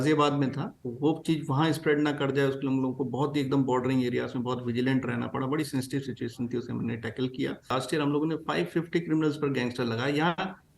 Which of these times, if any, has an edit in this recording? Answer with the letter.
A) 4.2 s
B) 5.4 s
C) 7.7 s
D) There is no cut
C